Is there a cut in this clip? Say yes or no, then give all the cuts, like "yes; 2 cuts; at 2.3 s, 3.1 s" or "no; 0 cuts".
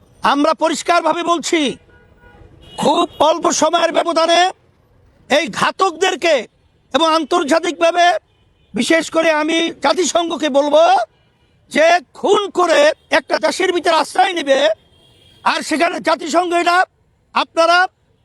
no; 0 cuts